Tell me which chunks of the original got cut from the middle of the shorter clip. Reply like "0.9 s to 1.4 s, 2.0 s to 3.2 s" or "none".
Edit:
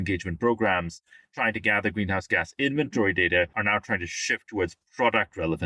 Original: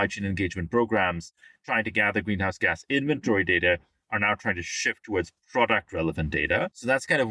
3.8 s to 4.1 s